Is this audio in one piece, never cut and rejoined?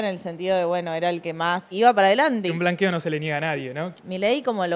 no; 3 cuts; at 1.7 s, 2.5 s, 3.9 s

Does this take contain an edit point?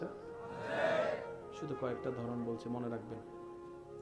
yes; 1 cut; at 3.1 s

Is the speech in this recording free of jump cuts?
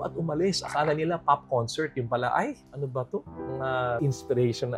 yes; 0 cuts

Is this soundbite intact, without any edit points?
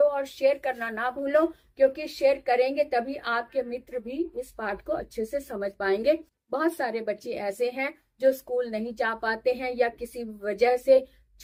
yes; 0 cuts

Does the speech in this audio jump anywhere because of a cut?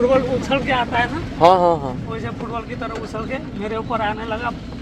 no; 0 cuts

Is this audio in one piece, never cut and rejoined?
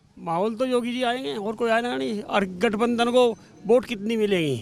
yes; 0 cuts

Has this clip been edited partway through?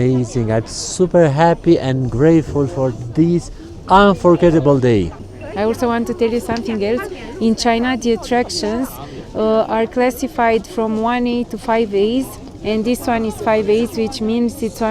no; 0 cuts

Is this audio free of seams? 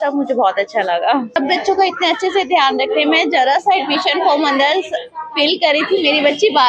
no; 1 cut; at 1.4 s

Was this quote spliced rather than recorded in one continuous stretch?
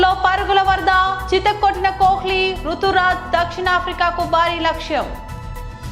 no; 0 cuts

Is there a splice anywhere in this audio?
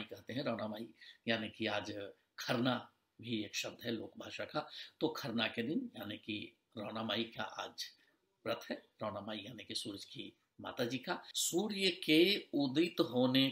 yes; 1 cut; at 11.3 s

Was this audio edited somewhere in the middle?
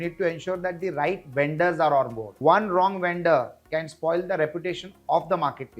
yes; 1 cut; at 2.2 s

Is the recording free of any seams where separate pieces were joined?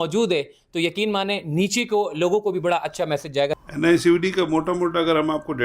no; 1 cut; at 3.6 s

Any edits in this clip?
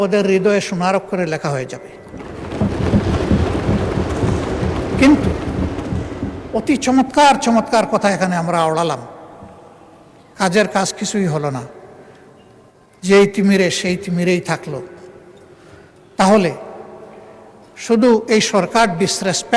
no; 0 cuts

